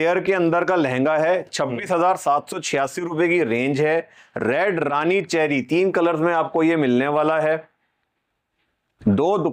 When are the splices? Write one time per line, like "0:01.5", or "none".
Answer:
none